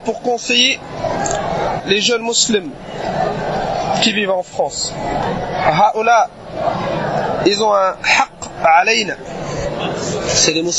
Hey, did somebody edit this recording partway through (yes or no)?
yes